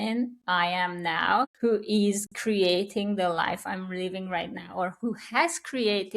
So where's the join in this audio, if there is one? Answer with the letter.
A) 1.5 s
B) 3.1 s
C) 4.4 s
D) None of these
A